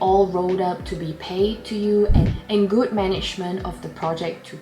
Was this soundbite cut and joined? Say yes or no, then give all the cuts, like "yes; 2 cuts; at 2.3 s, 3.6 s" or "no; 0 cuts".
yes; 1 cut; at 2.3 s